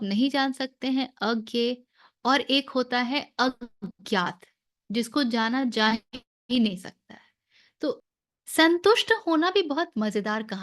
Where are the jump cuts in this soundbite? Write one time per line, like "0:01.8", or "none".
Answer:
0:08.1